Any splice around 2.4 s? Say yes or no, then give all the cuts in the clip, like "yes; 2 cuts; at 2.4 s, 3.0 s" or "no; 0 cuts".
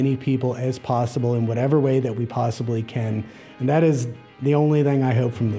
no; 0 cuts